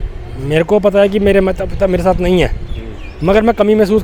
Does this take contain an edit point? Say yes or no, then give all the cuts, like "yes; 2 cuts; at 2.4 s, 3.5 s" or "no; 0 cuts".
no; 0 cuts